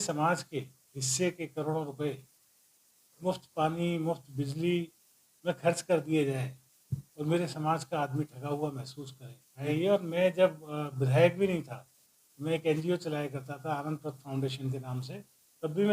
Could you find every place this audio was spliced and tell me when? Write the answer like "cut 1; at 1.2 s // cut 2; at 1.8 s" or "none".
cut 1; at 9.7 s